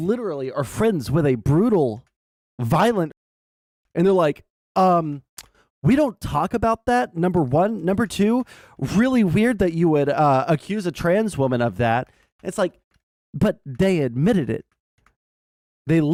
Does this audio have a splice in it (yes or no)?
no